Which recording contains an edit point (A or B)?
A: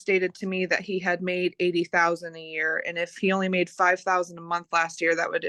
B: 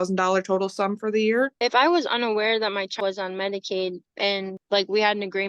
B